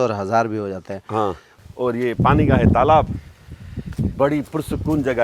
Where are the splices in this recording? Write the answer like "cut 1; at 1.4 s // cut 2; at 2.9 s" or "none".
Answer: cut 1; at 1.5 s